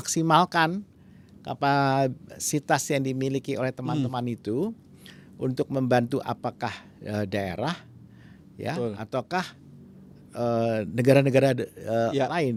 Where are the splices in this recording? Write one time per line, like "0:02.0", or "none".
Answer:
none